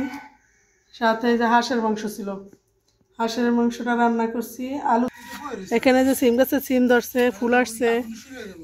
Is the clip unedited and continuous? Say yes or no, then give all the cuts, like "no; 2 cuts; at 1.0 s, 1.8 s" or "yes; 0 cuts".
no; 1 cut; at 5.1 s